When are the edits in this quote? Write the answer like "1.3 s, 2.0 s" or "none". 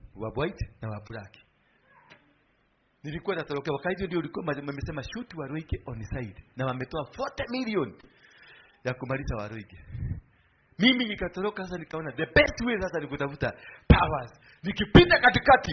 none